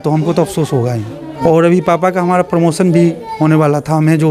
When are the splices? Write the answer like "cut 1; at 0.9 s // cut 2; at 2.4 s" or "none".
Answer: cut 1; at 1.2 s